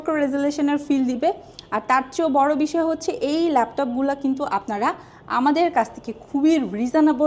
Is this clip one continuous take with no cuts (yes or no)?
yes